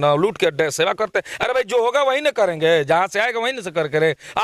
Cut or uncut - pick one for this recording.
uncut